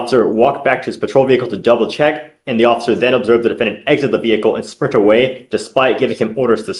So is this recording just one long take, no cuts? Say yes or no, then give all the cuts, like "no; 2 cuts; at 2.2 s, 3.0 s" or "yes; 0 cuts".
yes; 0 cuts